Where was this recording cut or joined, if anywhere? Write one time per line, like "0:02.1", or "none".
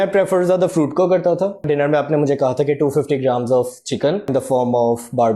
0:01.7
0:04.3